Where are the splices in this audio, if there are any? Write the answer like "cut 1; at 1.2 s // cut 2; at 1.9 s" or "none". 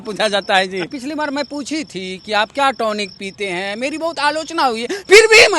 cut 1; at 0.9 s